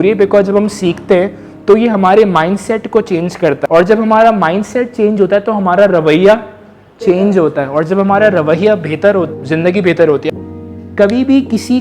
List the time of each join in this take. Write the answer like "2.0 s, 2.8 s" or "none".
3.6 s, 9.3 s, 10.3 s